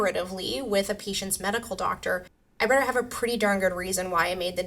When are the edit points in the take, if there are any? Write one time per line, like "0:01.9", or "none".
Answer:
none